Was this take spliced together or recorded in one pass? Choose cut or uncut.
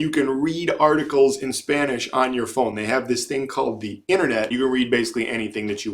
cut